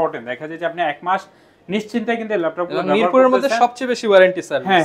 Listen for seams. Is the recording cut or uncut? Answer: uncut